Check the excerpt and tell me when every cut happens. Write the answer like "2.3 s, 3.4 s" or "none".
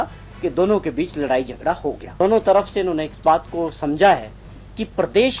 2.0 s